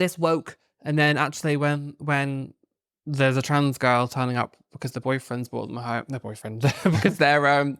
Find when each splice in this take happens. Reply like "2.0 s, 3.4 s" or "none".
none